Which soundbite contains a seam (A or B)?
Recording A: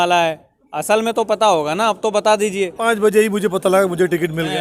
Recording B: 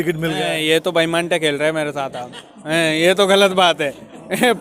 A